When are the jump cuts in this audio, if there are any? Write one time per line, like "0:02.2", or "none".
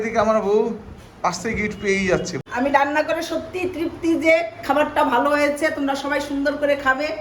0:02.4